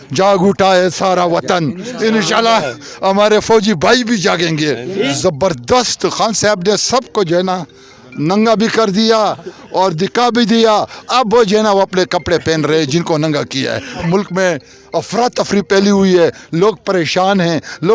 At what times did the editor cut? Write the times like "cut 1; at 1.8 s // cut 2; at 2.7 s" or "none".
cut 1; at 5.1 s // cut 2; at 14.0 s